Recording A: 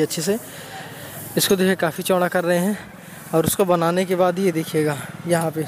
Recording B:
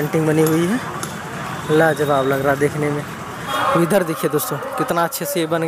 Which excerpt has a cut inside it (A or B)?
B